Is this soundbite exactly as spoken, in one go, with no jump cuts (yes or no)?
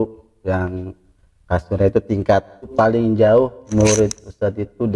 no